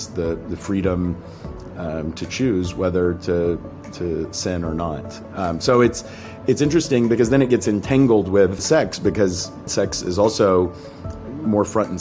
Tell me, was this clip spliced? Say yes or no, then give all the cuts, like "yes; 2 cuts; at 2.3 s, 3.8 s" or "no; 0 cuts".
yes; 2 cuts; at 8.6 s, 9.7 s